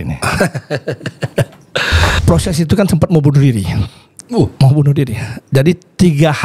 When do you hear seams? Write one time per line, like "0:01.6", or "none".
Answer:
0:02.2